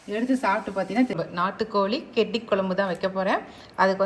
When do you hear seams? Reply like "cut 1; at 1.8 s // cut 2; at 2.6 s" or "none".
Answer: cut 1; at 1.1 s